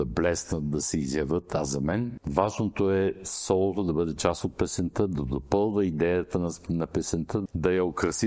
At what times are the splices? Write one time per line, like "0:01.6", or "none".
0:02.2
0:07.5